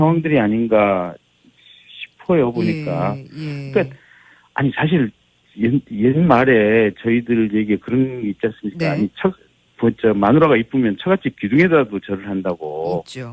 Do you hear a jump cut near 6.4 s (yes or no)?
yes